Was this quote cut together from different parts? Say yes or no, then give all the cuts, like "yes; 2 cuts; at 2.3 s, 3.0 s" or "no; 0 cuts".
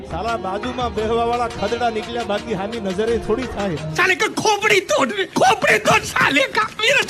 yes; 1 cut; at 3.9 s